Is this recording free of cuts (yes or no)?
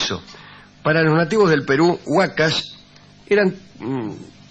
no